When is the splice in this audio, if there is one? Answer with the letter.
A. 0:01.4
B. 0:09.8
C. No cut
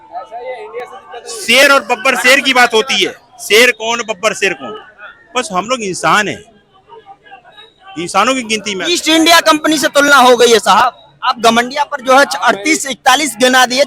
C